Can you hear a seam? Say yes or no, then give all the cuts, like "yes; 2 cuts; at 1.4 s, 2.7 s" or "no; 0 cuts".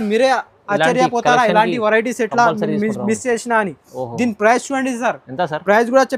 no; 0 cuts